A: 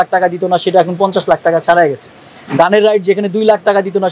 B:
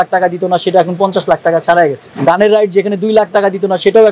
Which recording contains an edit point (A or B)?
B